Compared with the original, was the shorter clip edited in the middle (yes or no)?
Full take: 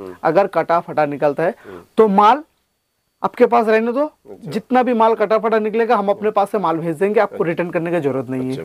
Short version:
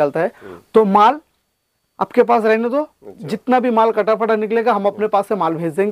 no